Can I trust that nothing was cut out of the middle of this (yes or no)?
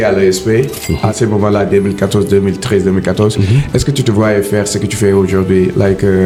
yes